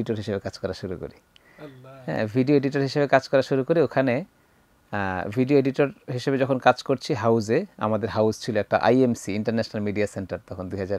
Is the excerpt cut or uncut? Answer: uncut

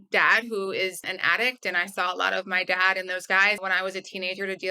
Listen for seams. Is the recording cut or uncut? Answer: cut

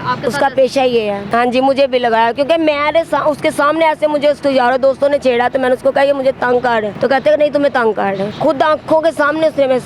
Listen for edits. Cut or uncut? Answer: cut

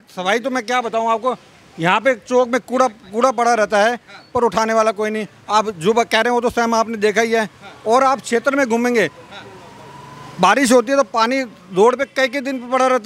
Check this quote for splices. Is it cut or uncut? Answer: uncut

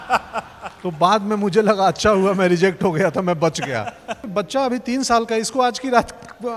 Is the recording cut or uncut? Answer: cut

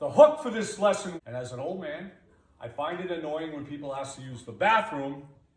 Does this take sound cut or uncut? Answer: cut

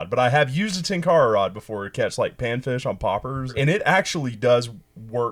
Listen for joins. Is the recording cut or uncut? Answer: cut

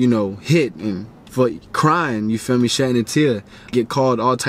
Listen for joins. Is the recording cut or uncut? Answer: cut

